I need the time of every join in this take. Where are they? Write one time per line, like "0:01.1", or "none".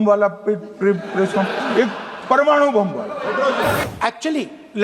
0:03.8